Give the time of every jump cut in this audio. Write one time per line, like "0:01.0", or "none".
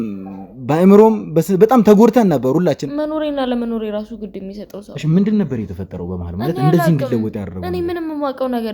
0:02.8